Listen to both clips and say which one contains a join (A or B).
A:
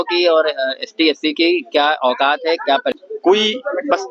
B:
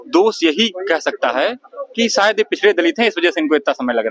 A